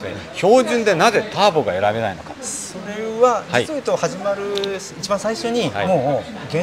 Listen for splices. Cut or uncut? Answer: uncut